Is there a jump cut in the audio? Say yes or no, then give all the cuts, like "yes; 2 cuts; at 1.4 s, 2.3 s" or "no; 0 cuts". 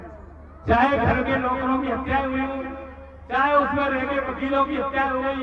no; 0 cuts